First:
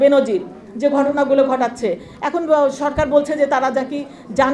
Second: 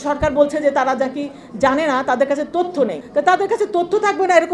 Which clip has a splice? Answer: second; 1 cut; at 3.0 s

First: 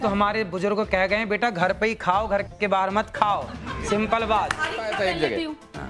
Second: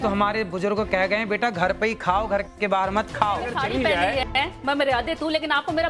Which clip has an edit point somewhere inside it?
second; 1 cut; at 3.6 s

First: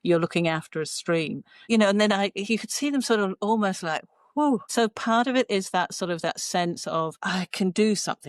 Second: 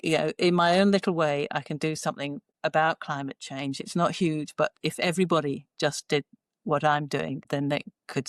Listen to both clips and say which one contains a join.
first; 1 cut; at 4.7 s

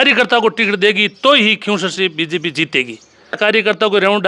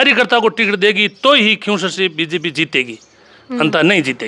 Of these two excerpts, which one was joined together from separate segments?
first; 1 cut; at 3.4 s

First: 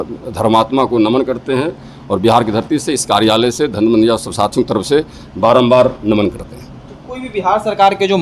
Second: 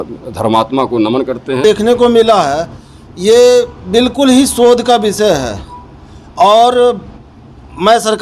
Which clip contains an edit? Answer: second; 1 cut; at 1.6 s

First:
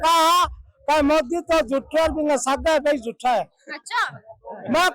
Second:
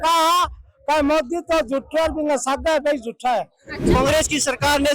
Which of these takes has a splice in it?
second; 1 cut; at 4.0 s

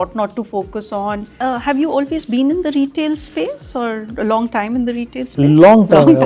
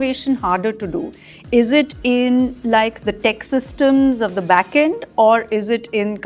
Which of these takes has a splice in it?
first; 1 cut; at 1.3 s

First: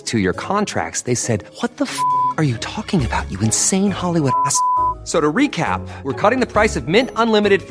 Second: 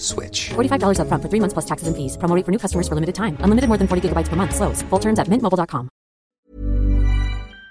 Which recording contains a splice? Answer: second; 1 cut; at 6.3 s

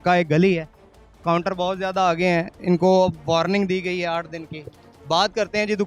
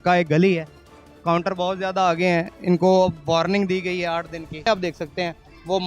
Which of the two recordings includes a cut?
second; 1 cut; at 4.7 s

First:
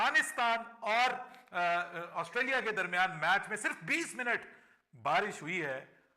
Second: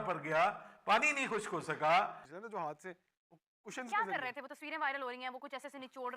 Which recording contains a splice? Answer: second; 1 cut; at 2.2 s

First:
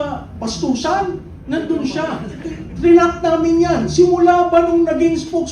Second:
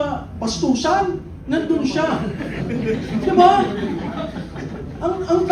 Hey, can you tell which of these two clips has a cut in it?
first; 1 cut; at 2.4 s

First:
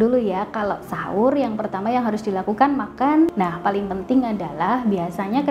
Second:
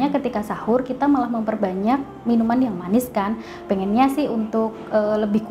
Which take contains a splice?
first; 1 cut; at 3.3 s

